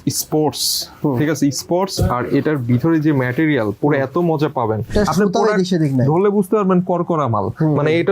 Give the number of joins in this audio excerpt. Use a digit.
1